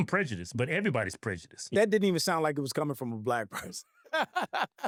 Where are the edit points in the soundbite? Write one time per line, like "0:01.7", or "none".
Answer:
none